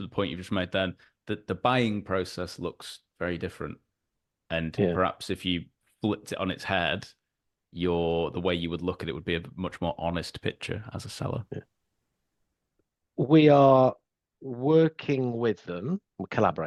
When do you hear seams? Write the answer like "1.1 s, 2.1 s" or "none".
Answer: none

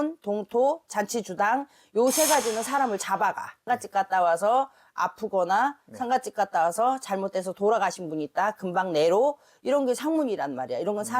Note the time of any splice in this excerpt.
3.6 s

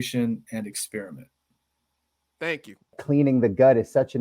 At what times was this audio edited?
3.0 s

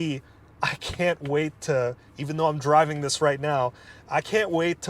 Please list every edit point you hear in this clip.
none

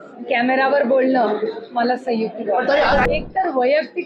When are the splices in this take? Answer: 3.1 s

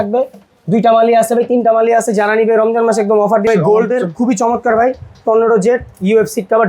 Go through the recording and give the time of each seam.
3.5 s

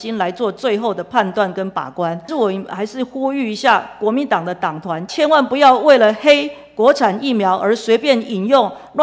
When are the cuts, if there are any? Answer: 2.3 s, 5.1 s

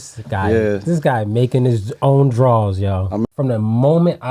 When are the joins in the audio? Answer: 3.3 s

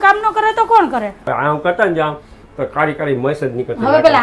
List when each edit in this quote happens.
1.2 s

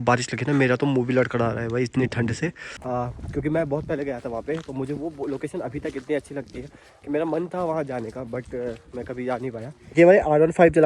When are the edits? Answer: 2.7 s, 10.0 s

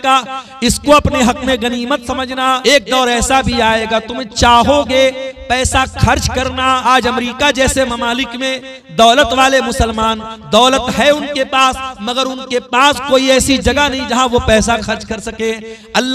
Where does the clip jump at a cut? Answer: 2.6 s, 6.9 s

